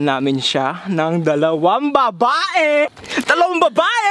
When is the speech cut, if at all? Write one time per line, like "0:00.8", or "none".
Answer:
0:03.0